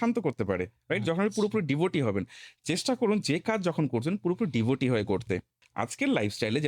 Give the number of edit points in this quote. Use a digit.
1